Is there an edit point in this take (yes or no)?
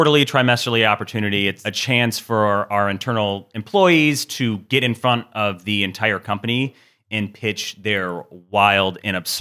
yes